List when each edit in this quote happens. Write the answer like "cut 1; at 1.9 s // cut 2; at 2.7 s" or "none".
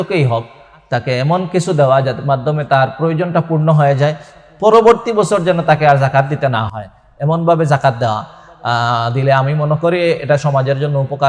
none